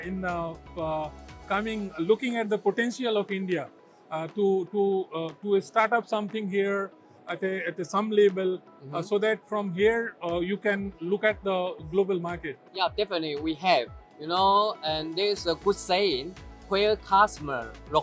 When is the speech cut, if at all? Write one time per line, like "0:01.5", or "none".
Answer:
0:12.6